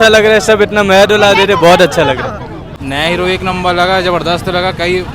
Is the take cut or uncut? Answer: cut